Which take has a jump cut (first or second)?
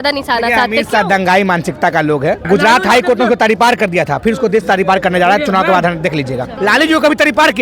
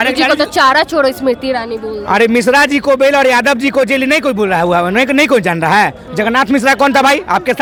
first